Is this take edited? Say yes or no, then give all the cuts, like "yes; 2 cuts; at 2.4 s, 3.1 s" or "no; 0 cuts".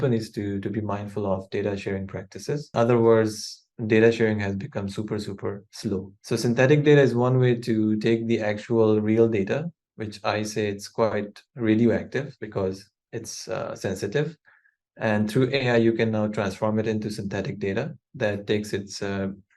yes; 2 cuts; at 2.7 s, 6.1 s